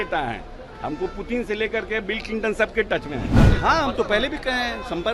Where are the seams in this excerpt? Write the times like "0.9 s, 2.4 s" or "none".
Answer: 3.3 s